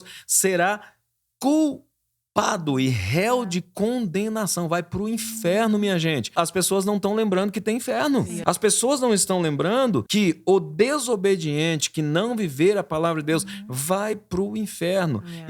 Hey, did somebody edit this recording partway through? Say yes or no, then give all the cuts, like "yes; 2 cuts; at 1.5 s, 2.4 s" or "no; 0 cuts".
yes; 3 cuts; at 6.3 s, 8.3 s, 10.1 s